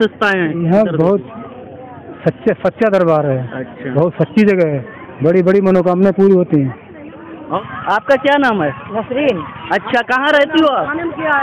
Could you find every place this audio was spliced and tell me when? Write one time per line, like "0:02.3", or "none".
0:07.6